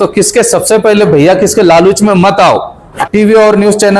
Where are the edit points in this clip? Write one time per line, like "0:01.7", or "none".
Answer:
0:02.9